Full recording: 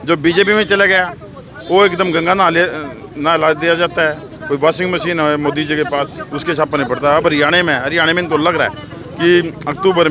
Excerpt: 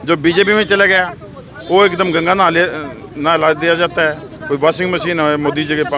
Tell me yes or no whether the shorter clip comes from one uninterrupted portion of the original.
yes